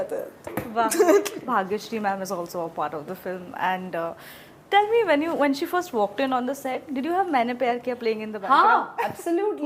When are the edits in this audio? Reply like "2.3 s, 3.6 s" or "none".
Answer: 1.5 s